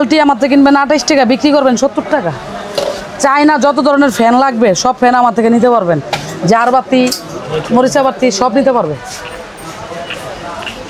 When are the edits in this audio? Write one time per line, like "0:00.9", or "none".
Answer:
none